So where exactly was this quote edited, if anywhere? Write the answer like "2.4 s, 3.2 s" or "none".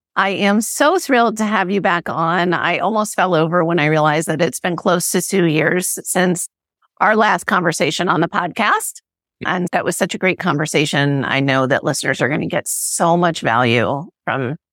9.7 s